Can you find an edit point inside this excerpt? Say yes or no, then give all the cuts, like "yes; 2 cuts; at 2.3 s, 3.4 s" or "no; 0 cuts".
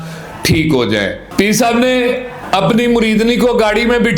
yes; 1 cut; at 1.2 s